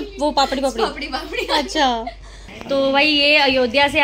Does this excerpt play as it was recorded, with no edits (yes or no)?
no